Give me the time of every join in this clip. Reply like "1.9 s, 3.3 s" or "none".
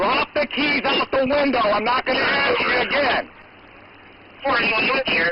none